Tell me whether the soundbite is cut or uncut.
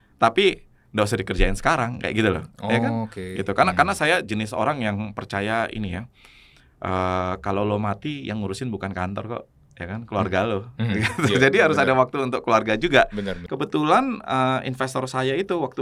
cut